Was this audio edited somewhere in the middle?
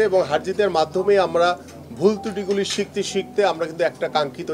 no; 0 cuts

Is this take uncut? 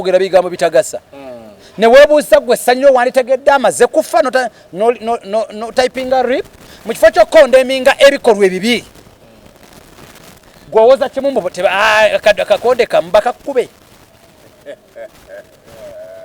yes; 0 cuts

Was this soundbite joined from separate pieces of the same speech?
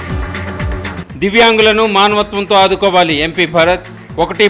yes; 1 cut; at 1.0 s

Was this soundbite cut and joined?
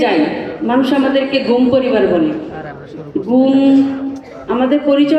no; 0 cuts

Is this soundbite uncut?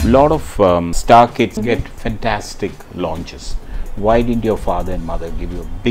no; 2 cuts; at 0.9 s, 1.5 s

